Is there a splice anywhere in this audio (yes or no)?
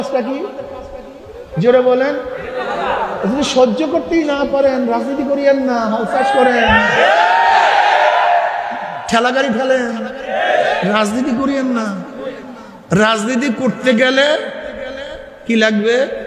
no